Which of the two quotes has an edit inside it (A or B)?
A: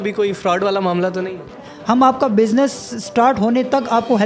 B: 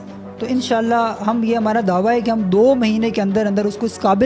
A